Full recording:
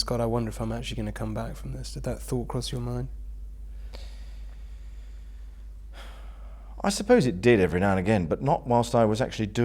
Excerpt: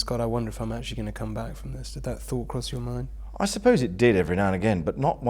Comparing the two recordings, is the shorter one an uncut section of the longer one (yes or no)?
no